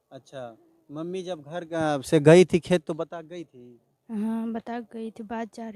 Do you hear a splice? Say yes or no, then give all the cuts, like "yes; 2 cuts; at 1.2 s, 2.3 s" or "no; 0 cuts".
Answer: no; 0 cuts